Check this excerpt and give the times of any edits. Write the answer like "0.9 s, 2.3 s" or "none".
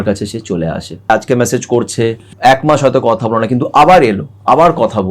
1.1 s, 2.3 s